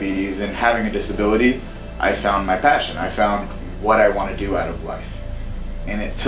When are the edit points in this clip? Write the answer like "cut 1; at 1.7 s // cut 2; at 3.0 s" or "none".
none